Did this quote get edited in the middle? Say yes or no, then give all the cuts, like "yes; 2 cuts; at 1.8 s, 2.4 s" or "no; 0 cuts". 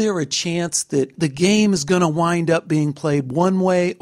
yes; 1 cut; at 1.2 s